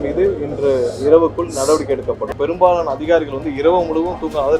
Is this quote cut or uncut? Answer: cut